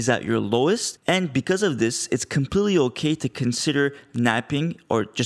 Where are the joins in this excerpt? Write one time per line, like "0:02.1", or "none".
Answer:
0:00.9